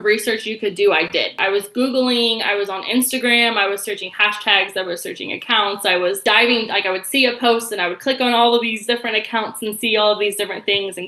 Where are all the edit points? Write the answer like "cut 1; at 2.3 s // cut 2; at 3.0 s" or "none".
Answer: cut 1; at 1.4 s // cut 2; at 6.2 s